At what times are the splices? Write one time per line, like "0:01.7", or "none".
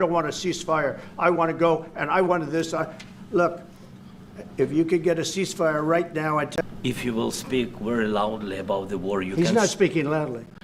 0:06.6